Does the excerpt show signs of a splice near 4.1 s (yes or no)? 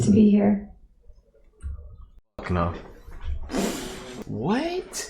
yes